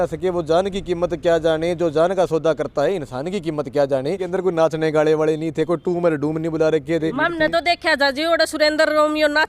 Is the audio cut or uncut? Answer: cut